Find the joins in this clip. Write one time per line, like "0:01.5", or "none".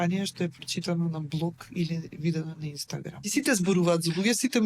0:03.3

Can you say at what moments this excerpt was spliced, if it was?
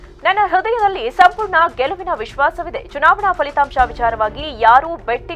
none

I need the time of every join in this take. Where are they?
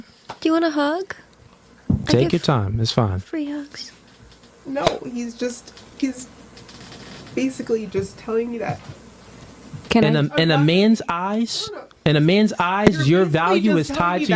none

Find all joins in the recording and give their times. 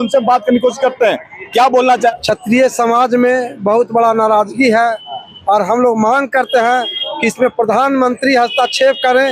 0:02.1

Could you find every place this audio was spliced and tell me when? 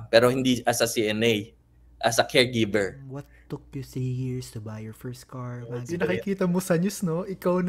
0:03.0
0:05.9

